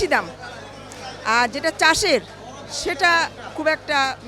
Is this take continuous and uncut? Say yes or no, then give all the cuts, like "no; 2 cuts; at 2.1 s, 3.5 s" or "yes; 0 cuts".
yes; 0 cuts